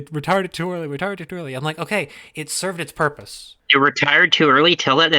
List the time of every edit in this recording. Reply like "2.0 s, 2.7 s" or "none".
3.5 s

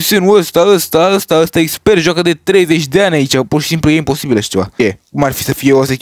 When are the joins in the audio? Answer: 4.7 s

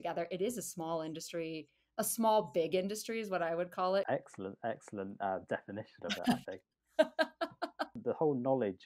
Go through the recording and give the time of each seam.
4.1 s, 8.0 s

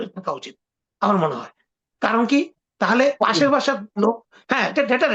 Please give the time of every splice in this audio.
none

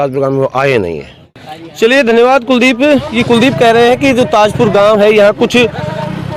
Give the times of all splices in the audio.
none

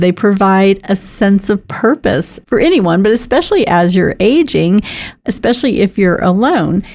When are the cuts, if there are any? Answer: none

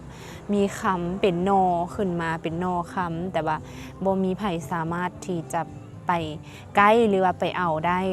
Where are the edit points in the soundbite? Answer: none

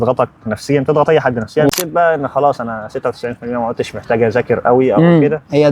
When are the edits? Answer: 1.7 s

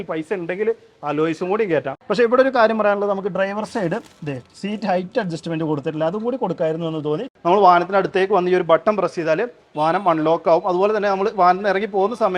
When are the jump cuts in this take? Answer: 1.9 s, 7.3 s

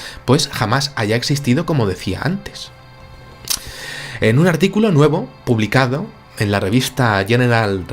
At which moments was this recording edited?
4.8 s

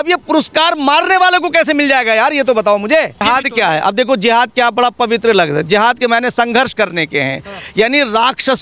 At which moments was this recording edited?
3.2 s

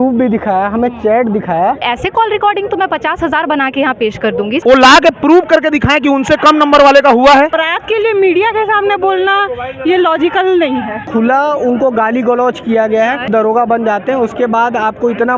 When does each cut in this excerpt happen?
1.8 s, 4.6 s, 7.7 s, 11.0 s, 13.3 s

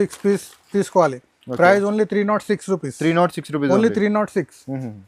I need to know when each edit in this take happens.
none

